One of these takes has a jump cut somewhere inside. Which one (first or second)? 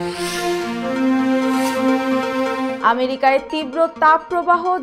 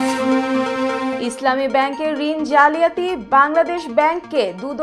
second